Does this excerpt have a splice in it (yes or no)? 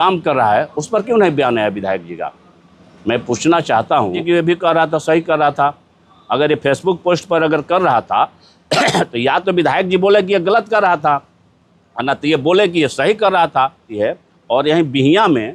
yes